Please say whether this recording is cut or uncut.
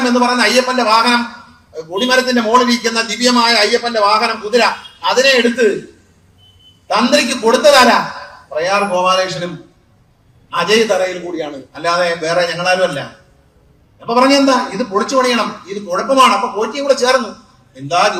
uncut